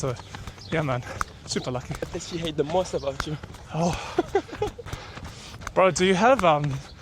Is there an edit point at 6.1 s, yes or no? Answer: no